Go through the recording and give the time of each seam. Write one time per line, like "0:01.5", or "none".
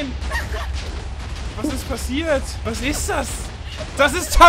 0:02.6